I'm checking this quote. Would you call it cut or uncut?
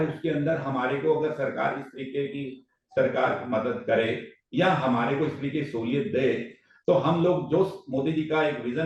uncut